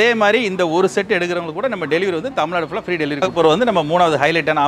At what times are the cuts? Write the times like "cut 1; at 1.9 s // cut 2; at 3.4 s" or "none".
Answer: cut 1; at 3.4 s